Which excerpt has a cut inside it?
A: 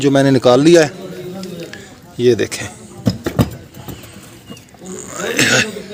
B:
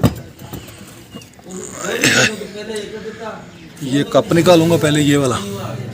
B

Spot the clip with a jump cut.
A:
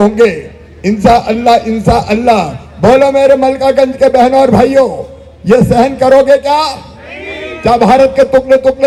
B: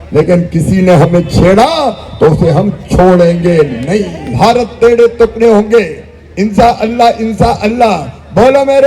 B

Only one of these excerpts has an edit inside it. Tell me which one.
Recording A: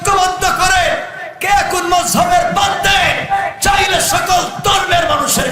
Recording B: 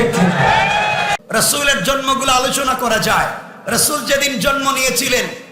B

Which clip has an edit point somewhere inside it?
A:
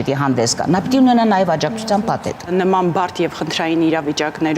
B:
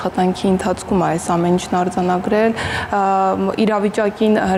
A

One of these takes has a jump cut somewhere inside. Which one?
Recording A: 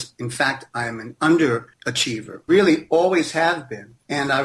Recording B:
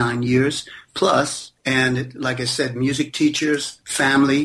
A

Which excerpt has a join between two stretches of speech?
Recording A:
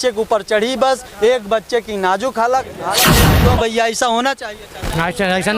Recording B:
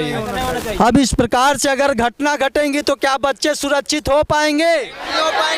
A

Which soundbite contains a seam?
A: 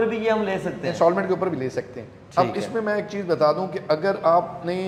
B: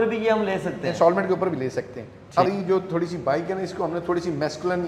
B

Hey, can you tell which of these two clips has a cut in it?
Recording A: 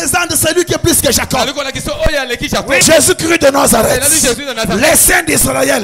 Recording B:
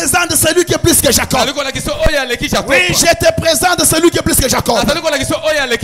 A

